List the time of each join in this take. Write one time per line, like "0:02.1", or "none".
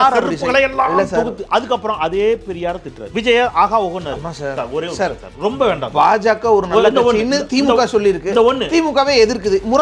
0:02.9